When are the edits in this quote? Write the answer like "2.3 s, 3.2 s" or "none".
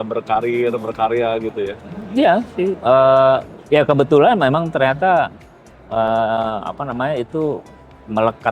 none

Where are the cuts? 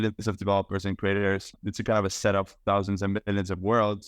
1.5 s

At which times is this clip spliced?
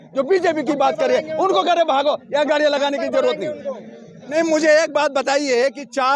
4.1 s

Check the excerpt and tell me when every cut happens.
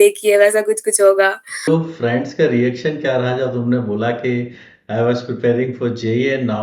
1.7 s

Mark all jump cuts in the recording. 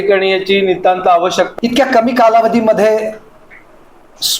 1.5 s

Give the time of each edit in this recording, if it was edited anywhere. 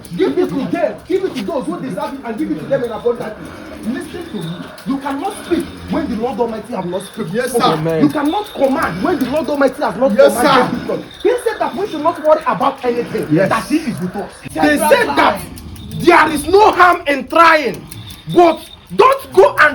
14.5 s

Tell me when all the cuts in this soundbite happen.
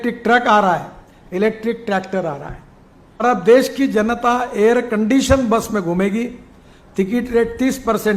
3.2 s

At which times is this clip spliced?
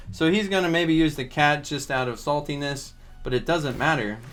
none

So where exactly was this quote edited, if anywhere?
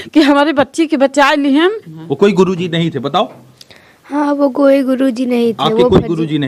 1.9 s

